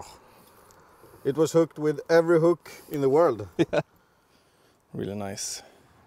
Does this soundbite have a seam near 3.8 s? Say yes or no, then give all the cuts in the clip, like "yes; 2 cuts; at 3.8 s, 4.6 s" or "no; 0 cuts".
yes; 1 cut; at 3.8 s